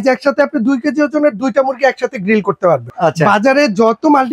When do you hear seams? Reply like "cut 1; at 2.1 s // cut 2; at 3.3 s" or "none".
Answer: cut 1; at 2.9 s